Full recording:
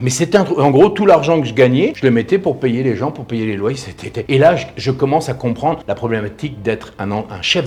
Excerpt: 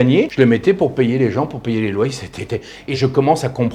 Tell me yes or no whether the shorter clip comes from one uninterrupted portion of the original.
no